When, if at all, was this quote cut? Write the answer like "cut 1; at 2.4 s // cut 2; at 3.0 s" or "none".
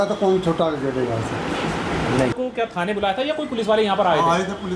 cut 1; at 2.3 s